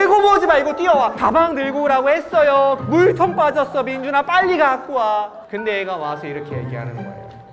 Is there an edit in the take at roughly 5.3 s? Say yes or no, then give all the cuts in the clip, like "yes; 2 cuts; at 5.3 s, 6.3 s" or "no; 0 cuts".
no; 2 cuts; at 1.1 s, 2.8 s